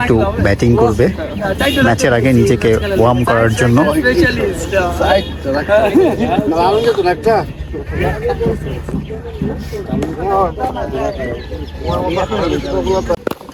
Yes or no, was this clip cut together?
no